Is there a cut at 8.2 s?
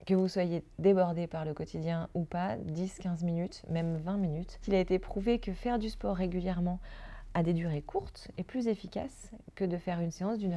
no; 0 cuts

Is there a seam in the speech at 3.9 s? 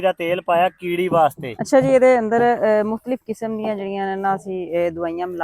no; 1 cut; at 1.5 s

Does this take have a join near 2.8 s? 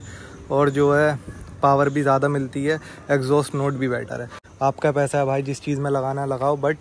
no; 1 cut; at 4.4 s

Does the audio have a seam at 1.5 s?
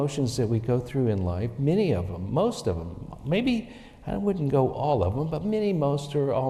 no; 0 cuts

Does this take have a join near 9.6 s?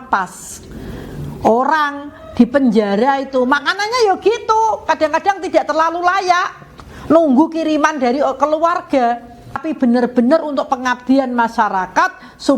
yes; 1 cut; at 9.6 s

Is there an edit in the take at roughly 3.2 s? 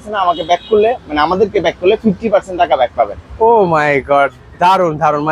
no; 0 cuts

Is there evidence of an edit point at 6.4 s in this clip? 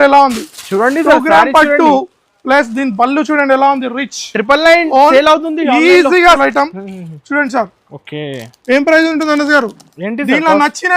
yes; 1 cut; at 6.4 s

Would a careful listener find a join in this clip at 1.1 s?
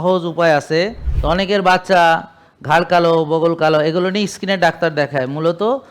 yes; 1 cut; at 1.1 s

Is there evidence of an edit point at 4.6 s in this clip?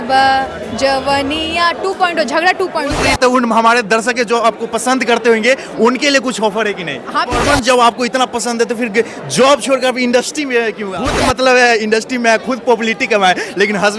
no; 3 cuts; at 3.0 s, 7.4 s, 11.2 s

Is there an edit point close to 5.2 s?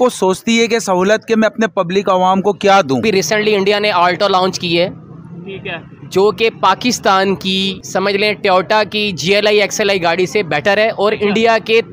no; 2 cuts; at 3.0 s, 7.8 s

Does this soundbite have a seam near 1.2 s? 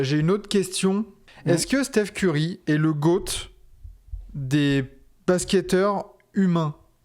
yes; 1 cut; at 1.2 s

